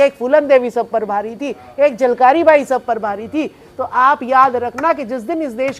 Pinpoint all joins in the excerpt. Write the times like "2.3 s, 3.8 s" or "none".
none